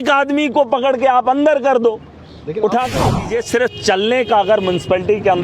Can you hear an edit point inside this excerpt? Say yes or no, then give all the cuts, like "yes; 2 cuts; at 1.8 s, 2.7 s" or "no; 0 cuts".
yes; 1 cut; at 3.0 s